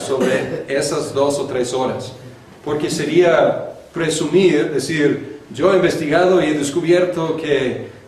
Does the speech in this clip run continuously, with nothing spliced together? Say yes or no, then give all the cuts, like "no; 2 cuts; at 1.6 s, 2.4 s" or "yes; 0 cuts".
yes; 0 cuts